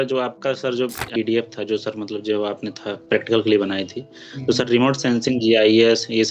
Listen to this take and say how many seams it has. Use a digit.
1